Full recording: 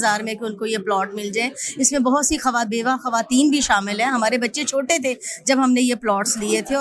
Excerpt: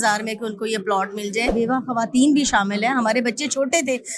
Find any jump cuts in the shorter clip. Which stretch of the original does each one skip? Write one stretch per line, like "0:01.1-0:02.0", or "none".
0:01.5-0:02.7